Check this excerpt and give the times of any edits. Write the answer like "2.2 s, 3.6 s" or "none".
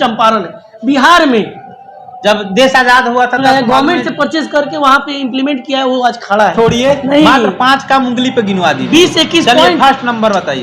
3.4 s, 6.5 s